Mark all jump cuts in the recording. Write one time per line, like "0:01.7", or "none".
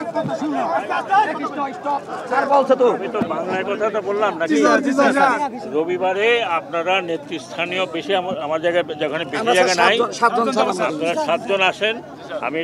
none